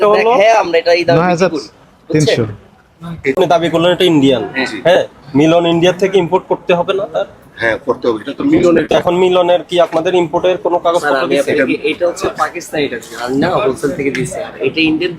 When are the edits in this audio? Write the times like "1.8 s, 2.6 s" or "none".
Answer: 3.3 s